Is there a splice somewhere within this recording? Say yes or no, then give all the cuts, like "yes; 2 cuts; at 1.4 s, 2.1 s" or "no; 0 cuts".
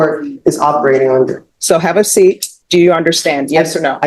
yes; 2 cuts; at 1.5 s, 2.5 s